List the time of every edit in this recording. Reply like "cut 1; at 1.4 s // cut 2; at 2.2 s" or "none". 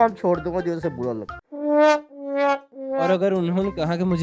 none